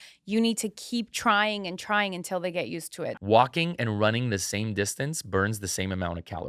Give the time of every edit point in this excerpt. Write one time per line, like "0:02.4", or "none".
0:03.1